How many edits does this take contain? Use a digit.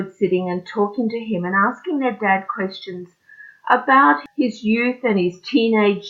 1